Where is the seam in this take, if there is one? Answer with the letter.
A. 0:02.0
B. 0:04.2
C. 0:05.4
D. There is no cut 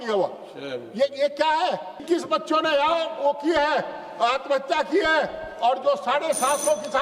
A